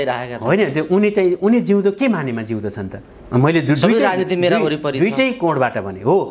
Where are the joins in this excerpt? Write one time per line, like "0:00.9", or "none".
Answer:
none